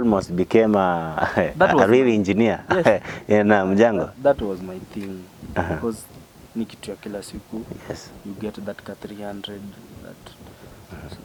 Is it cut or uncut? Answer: uncut